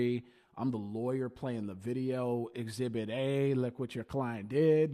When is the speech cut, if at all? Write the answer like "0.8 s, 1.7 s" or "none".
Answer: none

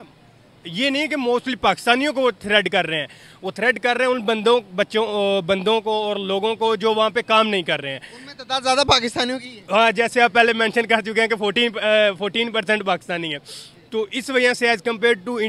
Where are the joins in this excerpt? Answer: none

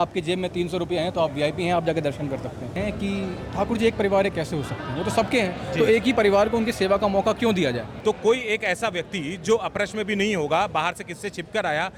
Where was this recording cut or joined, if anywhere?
2.7 s, 7.9 s

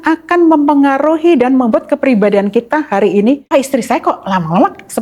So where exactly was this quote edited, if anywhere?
3.4 s

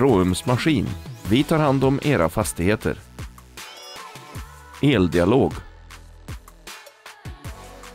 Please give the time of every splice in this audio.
5.6 s

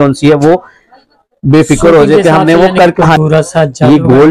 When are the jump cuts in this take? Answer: 3.2 s

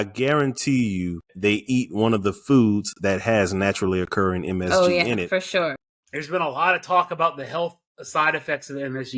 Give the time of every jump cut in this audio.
1.3 s, 5.8 s

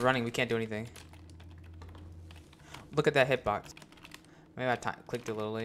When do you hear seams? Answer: 3.8 s

